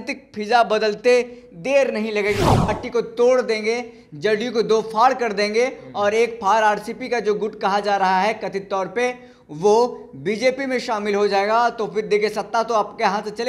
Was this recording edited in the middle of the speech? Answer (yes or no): yes